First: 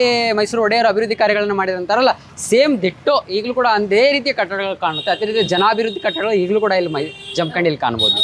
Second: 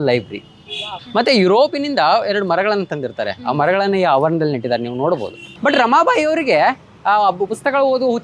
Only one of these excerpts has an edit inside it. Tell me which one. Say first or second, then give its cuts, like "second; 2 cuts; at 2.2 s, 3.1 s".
second; 2 cuts; at 1.0 s, 5.4 s